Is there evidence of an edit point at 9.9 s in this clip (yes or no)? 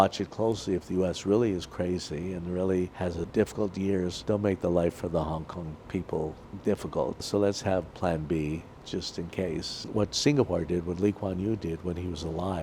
yes